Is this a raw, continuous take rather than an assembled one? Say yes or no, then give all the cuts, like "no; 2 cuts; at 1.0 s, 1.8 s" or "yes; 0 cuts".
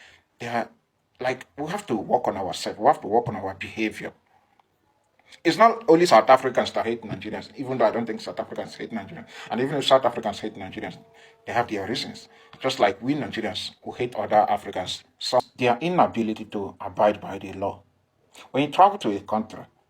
no; 1 cut; at 15.4 s